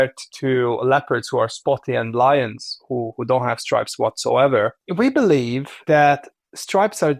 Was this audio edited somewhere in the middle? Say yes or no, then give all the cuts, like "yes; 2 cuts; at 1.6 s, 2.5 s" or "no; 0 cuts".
yes; 2 cuts; at 4.8 s, 5.7 s